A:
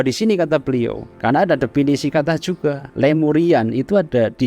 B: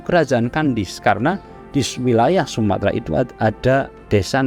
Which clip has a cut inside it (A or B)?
A